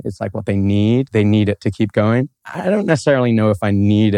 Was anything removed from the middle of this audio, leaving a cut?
yes; 1 cut; at 1.1 s

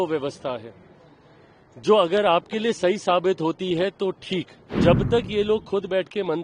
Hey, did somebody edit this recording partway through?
yes; 1 cut; at 4.6 s

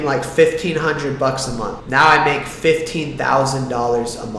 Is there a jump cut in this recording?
yes; 1 cut; at 1.8 s

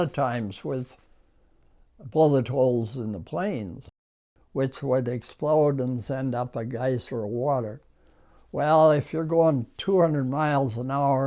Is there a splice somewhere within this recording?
yes; 1 cut; at 4.0 s

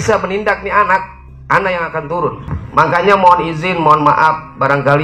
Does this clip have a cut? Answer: yes; 1 cut; at 2.5 s

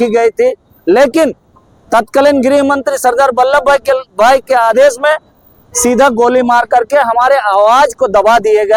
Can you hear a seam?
no; 0 cuts

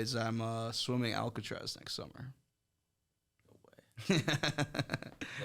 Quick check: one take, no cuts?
yes; 0 cuts

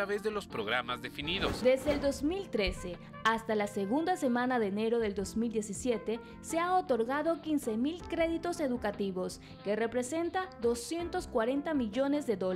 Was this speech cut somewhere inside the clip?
yes; 1 cut; at 1.6 s

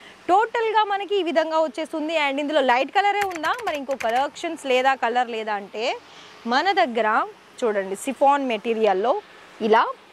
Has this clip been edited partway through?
no; 0 cuts

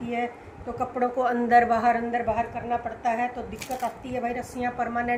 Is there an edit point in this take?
no; 0 cuts

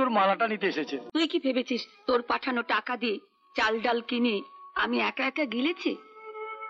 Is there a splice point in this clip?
yes; 1 cut; at 1.0 s

